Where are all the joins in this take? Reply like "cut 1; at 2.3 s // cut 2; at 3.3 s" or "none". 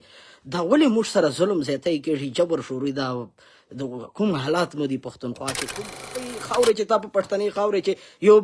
cut 1; at 6.2 s